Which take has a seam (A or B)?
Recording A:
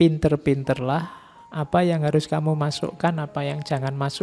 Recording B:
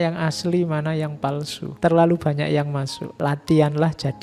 B